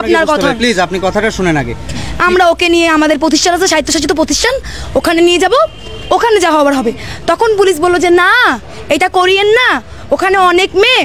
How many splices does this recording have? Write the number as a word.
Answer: one